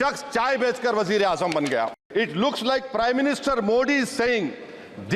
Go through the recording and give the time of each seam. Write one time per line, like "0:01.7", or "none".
0:02.0